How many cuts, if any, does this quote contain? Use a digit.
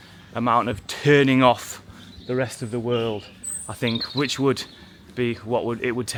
0